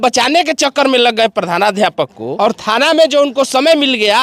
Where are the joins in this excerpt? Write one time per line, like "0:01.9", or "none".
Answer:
0:02.2